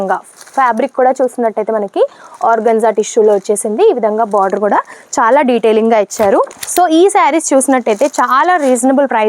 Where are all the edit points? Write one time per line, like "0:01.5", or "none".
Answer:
0:06.6